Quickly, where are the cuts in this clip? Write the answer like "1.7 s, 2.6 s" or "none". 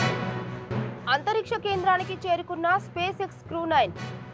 none